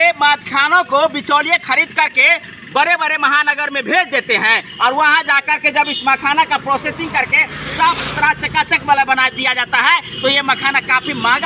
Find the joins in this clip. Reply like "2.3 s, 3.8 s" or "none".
none